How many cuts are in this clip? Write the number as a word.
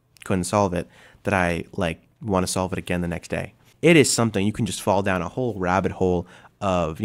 one